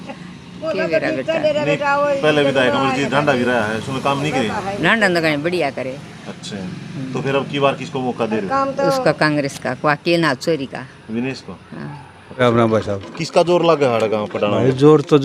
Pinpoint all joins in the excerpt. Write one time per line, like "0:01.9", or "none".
0:12.4